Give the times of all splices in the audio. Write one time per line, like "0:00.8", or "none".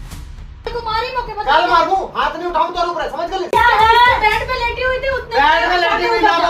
0:03.5